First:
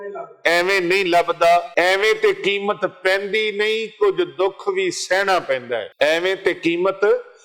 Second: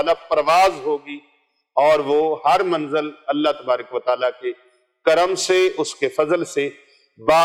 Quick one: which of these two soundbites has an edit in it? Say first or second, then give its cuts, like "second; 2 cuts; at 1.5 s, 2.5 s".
first; 2 cuts; at 1.7 s, 5.9 s